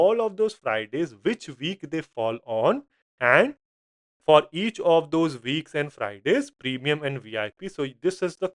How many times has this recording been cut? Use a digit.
0